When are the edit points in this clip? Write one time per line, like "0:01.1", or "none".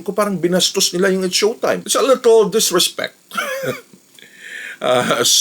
0:01.8